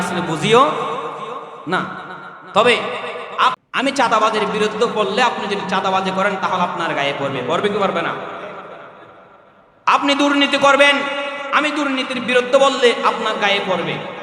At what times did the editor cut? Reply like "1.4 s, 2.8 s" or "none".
3.6 s